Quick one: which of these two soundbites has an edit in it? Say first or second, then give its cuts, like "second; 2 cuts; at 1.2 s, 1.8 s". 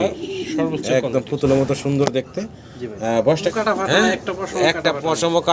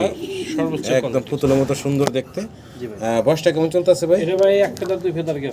first; 1 cut; at 3.5 s